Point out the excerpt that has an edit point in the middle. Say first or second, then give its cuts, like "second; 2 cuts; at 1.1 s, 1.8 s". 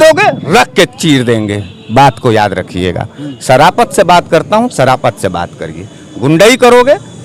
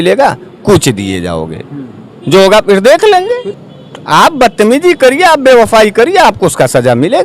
second; 1 cut; at 3.5 s